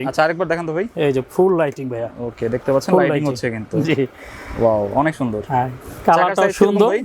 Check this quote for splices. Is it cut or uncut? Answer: uncut